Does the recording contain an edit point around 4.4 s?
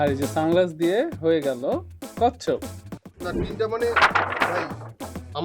no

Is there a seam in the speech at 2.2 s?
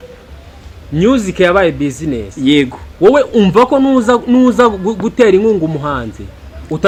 no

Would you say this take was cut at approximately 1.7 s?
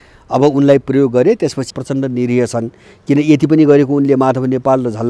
yes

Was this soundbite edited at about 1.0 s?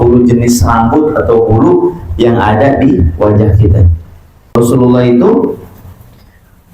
no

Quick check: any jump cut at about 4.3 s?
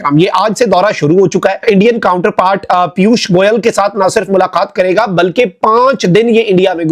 no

